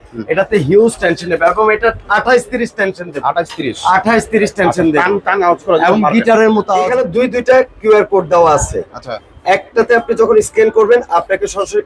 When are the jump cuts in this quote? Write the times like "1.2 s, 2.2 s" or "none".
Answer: 6.9 s